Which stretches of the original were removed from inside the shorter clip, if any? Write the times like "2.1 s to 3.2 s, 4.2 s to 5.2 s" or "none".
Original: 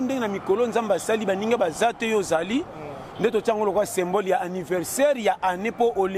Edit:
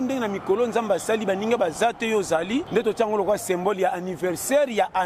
2.7 s to 3.1 s